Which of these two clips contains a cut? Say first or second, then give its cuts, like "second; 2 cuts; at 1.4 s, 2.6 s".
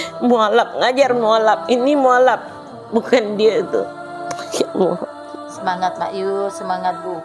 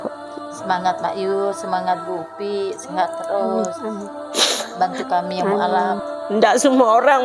second; 1 cut; at 6.1 s